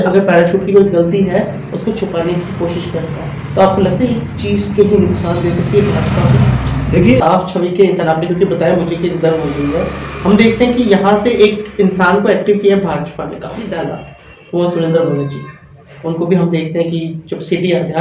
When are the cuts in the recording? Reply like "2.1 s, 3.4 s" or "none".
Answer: 7.2 s